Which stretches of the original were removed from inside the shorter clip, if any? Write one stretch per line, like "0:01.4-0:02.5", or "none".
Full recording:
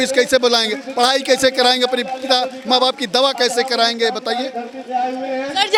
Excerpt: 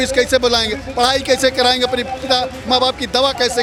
none